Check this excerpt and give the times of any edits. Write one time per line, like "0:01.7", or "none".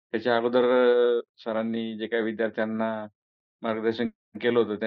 none